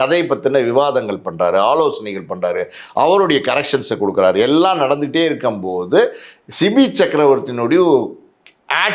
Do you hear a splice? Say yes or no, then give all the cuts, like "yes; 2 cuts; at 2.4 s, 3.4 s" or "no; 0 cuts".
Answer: no; 0 cuts